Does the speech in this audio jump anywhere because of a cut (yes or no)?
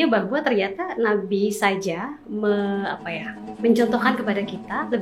no